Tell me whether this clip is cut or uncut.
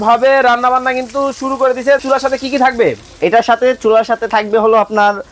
cut